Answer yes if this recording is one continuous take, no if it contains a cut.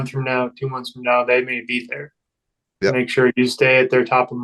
yes